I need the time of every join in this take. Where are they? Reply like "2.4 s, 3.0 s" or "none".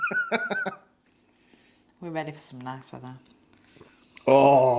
0.9 s